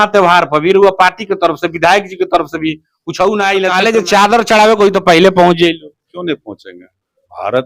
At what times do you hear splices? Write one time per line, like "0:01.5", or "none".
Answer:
0:03.7

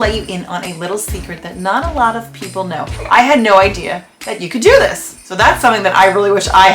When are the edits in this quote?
0:02.9
0:05.1

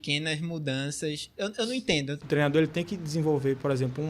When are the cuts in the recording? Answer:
0:02.2

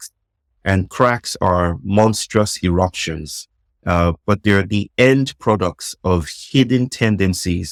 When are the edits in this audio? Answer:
none

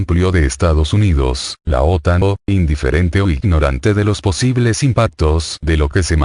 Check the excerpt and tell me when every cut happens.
none

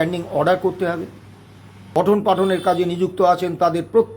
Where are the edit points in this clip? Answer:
0:01.8

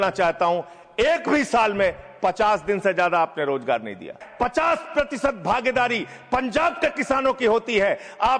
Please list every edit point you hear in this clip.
0:04.2

